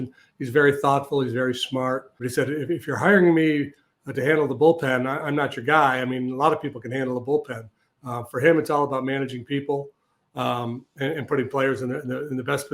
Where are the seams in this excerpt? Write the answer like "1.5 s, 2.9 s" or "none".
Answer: 2.2 s